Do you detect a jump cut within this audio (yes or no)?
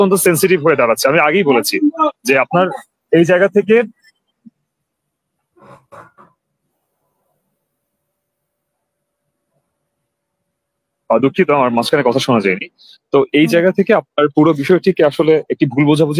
no